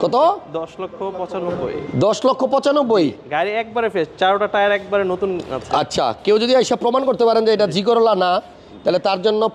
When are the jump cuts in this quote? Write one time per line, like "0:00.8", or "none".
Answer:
none